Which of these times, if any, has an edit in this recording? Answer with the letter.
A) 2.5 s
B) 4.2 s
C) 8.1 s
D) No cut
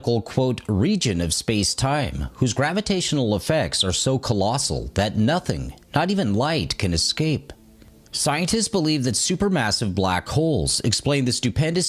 B